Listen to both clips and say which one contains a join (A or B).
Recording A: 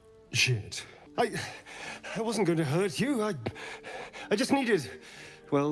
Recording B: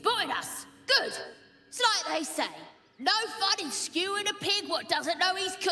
A